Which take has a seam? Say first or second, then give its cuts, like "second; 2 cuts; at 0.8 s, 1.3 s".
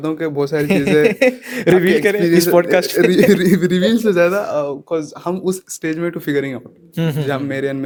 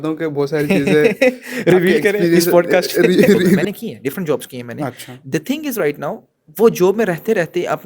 second; 1 cut; at 3.6 s